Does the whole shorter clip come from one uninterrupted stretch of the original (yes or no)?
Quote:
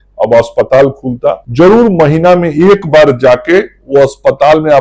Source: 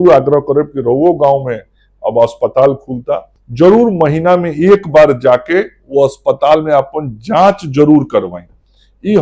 no